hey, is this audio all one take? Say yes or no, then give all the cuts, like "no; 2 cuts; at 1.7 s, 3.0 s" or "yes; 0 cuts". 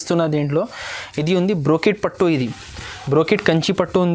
yes; 0 cuts